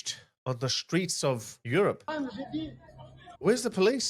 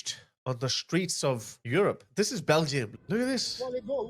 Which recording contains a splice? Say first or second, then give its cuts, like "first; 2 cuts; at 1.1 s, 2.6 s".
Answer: first; 1 cut; at 2.1 s